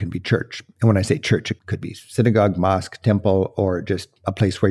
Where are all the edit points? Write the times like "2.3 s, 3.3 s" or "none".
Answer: 1.5 s